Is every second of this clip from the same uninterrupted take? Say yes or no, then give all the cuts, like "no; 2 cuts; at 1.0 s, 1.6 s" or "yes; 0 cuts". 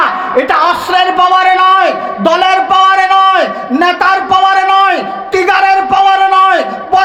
yes; 0 cuts